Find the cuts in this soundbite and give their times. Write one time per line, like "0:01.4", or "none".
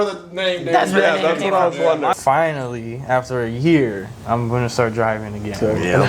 0:02.2